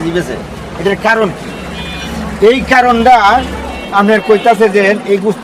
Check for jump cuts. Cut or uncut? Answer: uncut